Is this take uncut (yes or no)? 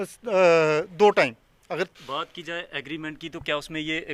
no